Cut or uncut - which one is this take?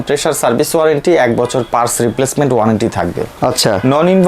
uncut